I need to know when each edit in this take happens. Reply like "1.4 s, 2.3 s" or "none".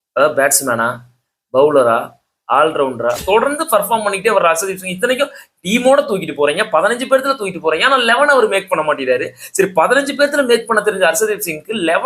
3.2 s